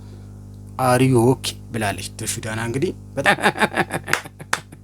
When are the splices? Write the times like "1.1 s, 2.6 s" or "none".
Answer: 3.2 s